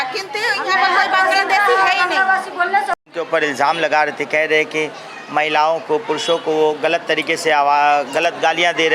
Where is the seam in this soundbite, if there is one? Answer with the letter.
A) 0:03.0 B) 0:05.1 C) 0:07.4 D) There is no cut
A